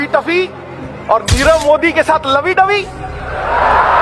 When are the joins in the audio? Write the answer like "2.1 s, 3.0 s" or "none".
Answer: none